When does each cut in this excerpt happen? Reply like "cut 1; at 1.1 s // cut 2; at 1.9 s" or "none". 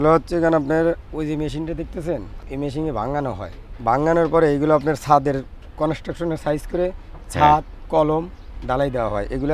cut 1; at 2.4 s // cut 2; at 3.8 s